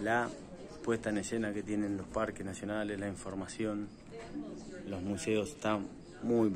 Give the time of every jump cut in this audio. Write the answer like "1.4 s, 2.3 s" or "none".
none